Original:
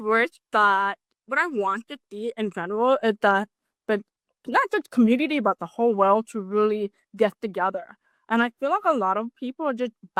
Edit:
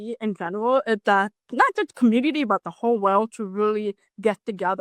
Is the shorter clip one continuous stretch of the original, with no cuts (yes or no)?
no